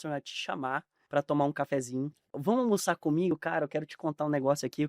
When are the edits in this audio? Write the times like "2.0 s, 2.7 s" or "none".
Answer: 0.9 s, 2.4 s